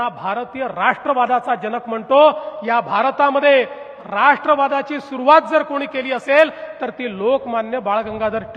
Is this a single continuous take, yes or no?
yes